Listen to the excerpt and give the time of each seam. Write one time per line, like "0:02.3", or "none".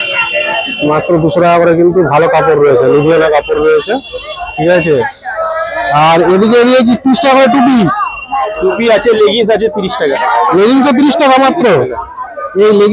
none